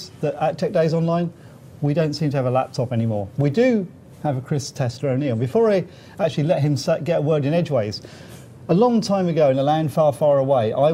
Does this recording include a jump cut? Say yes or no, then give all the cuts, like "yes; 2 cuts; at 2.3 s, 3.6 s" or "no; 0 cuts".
no; 0 cuts